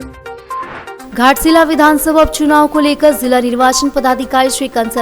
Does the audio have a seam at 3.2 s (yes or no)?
no